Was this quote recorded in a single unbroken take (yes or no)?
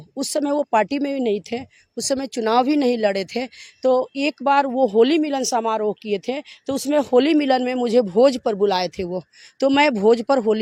yes